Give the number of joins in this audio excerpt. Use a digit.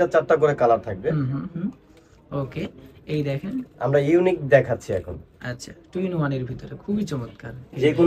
0